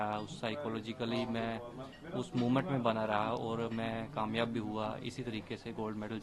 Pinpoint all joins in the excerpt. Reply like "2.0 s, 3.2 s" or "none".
none